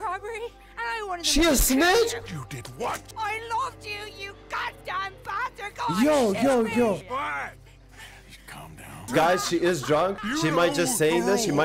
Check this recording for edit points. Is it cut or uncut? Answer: cut